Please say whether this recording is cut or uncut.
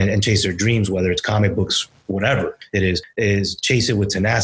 uncut